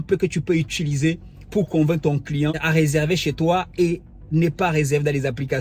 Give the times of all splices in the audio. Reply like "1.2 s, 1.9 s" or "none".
2.6 s